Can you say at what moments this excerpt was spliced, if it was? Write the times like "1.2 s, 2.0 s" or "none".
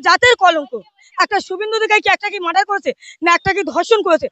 1.0 s